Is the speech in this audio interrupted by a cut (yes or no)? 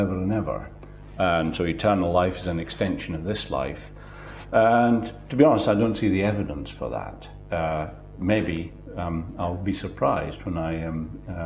no